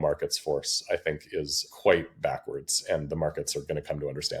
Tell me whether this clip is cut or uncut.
cut